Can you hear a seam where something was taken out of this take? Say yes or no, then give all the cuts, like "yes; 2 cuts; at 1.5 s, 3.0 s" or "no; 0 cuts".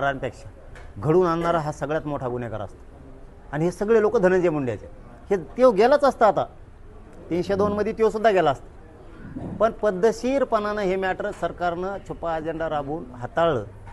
no; 0 cuts